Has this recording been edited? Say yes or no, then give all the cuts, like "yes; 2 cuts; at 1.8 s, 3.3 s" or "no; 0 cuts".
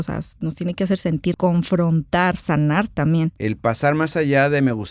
yes; 2 cuts; at 1.3 s, 3.3 s